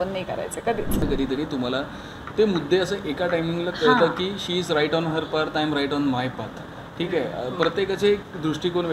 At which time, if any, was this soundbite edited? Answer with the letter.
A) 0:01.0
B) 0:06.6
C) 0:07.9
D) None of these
A